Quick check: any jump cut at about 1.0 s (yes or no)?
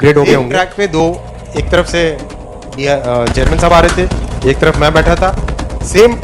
yes